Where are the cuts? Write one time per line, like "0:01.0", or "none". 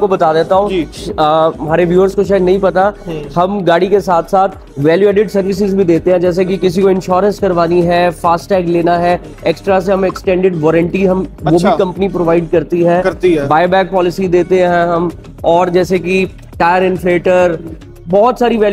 none